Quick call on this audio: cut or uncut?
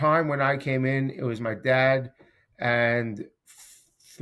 uncut